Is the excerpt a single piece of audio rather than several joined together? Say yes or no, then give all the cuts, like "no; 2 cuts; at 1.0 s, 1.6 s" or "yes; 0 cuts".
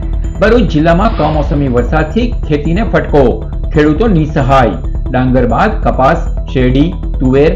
yes; 0 cuts